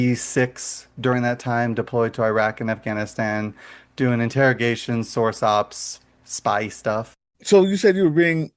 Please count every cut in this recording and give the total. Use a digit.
1